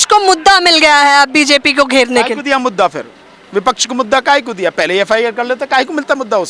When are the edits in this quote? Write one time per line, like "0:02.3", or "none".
none